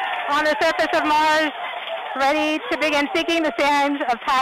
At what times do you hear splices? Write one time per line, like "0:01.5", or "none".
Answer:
none

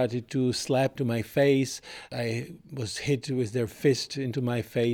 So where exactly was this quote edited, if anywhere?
0:00.9
0:02.1

